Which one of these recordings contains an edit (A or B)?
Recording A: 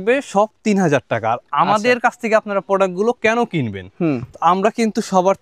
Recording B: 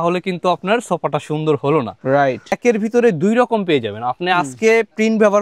B